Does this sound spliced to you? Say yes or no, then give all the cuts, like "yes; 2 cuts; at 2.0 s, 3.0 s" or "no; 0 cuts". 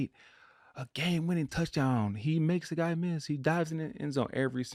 no; 0 cuts